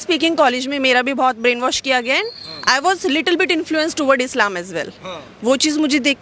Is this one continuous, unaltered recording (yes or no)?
yes